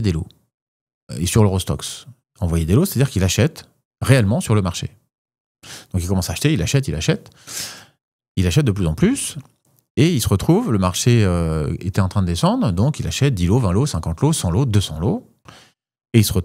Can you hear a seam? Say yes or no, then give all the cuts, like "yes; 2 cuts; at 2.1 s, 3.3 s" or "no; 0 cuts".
no; 0 cuts